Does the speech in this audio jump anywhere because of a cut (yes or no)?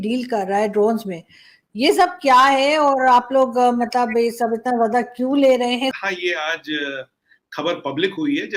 no